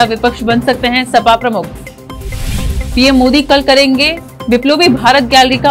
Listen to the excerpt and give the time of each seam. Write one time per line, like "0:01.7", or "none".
none